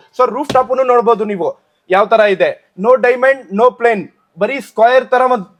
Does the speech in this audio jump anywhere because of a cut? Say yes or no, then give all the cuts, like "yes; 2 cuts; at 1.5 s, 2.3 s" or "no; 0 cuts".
no; 0 cuts